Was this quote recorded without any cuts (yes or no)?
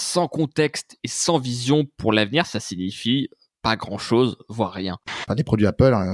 no